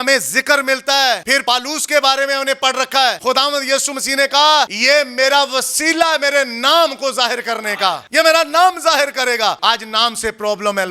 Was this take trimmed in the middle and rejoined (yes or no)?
yes